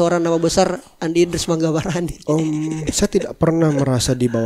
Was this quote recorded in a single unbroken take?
yes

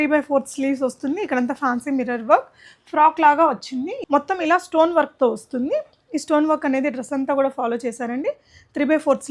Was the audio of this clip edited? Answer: yes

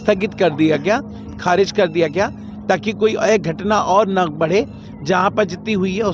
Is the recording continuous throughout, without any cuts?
yes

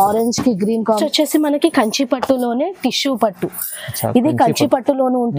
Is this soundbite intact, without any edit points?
no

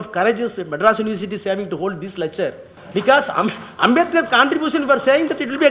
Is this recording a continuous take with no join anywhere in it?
no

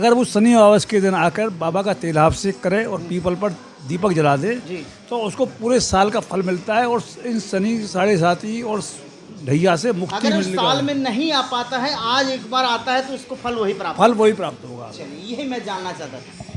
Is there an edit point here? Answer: no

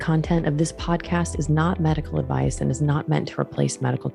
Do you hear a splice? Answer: no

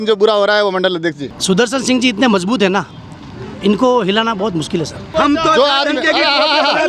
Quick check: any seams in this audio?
yes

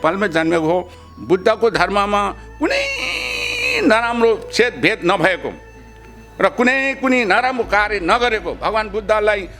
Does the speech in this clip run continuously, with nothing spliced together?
no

